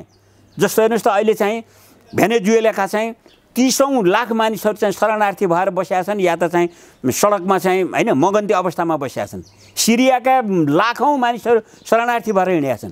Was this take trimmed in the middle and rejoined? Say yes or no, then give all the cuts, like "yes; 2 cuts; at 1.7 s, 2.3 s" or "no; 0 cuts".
no; 0 cuts